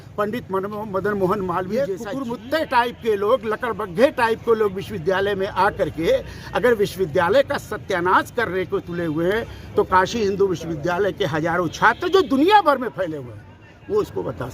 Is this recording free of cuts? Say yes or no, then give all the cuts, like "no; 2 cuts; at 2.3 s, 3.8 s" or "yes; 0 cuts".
no; 1 cut; at 1.8 s